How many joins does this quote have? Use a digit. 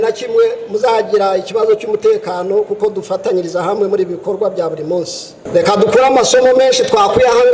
1